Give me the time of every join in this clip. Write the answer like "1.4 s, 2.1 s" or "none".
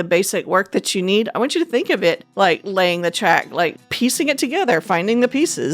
2.2 s

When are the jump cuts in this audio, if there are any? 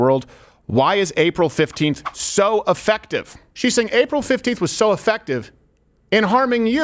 3.4 s

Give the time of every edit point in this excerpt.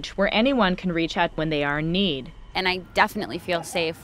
1.4 s, 2.5 s

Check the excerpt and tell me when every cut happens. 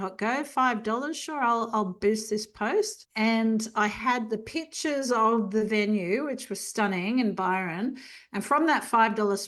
3.0 s

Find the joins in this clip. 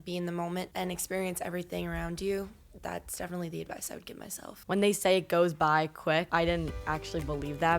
4.6 s

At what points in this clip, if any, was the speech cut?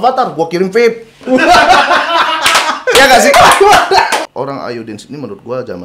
4.2 s

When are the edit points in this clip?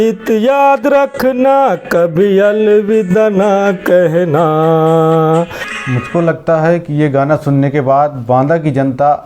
5.7 s

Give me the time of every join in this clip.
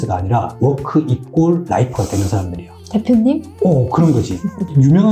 none

